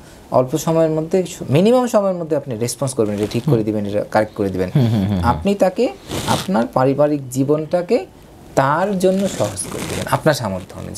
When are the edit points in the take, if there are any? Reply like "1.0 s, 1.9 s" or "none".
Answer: none